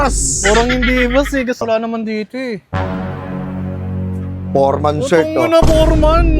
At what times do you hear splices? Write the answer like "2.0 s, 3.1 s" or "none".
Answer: 1.6 s